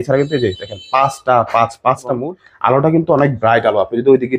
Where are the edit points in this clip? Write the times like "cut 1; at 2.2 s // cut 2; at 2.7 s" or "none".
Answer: cut 1; at 2.2 s